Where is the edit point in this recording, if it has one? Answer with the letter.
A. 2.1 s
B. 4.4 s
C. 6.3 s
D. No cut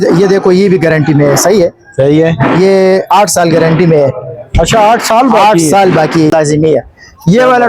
C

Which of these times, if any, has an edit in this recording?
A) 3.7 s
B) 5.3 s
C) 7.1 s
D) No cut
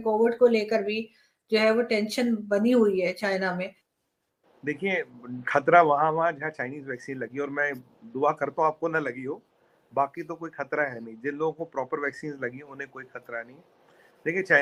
D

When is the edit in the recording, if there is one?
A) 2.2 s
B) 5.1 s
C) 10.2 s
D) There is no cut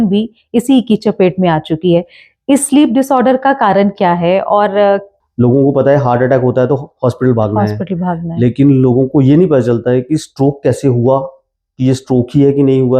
B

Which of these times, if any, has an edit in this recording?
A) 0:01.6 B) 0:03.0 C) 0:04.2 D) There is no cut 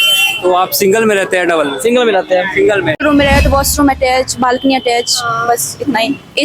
B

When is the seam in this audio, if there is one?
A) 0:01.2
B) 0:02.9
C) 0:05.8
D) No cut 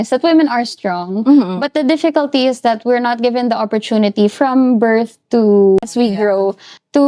C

